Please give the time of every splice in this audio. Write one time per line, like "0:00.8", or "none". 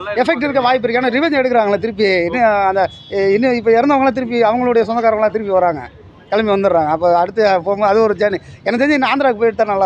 none